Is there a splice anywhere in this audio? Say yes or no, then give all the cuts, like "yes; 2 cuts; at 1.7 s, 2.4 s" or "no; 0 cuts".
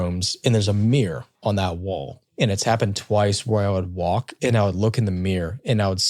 no; 0 cuts